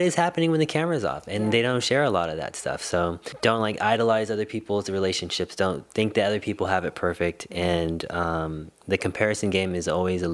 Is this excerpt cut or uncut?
cut